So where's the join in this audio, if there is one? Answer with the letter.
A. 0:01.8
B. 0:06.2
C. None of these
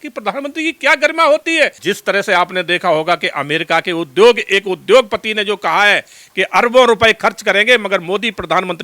A